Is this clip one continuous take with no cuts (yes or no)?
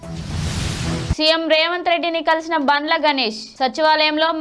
yes